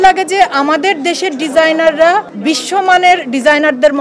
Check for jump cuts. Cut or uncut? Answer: cut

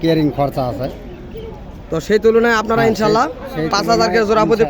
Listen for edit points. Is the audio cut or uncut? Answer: uncut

